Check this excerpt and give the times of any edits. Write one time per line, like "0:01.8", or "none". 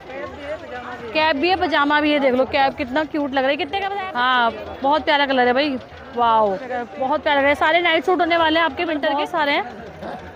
0:03.9
0:06.9
0:09.1